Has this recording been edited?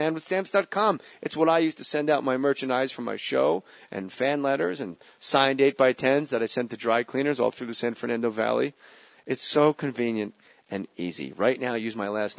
yes; 1 cut; at 4.4 s

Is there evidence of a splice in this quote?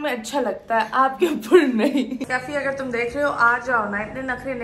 yes; 1 cut; at 2.2 s

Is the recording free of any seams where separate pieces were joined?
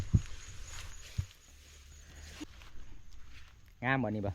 no; 1 cut; at 2.4 s

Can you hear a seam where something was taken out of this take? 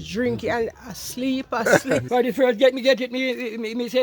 yes; 1 cut; at 2.1 s

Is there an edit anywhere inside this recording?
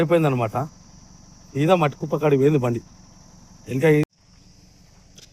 yes; 1 cut; at 4.0 s

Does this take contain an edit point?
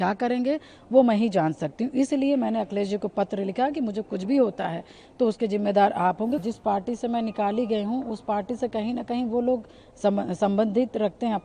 yes; 1 cut; at 6.4 s

